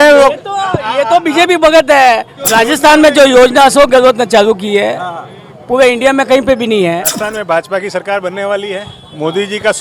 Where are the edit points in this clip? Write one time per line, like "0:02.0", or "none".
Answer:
0:02.3
0:07.1